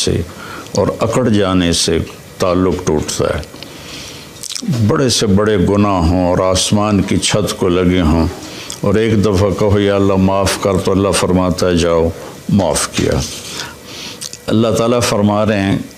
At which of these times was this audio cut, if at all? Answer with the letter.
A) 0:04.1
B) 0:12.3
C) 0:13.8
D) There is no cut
C